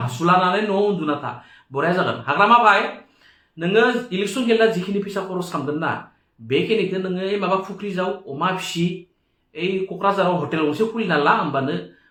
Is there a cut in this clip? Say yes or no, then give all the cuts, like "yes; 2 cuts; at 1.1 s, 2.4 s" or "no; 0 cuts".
no; 0 cuts